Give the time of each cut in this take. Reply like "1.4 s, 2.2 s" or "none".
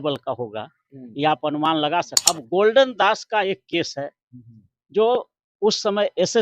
2.4 s

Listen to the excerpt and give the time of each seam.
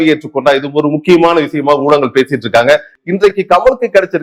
2.9 s

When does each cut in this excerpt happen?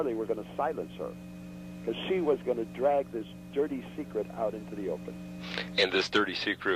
none

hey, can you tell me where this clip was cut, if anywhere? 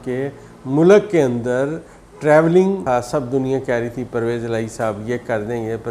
2.8 s

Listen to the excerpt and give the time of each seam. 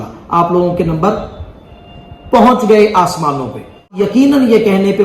3.9 s

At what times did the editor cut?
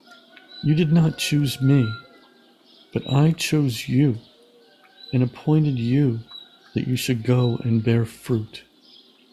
none

